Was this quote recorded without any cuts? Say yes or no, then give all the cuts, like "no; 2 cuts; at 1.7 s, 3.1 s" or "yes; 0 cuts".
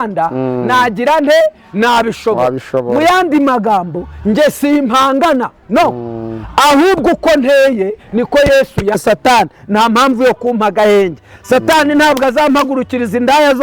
no; 1 cut; at 9.0 s